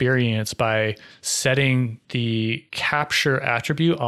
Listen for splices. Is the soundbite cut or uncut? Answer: cut